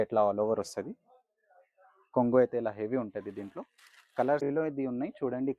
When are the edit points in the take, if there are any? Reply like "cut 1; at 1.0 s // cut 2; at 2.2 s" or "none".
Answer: cut 1; at 4.4 s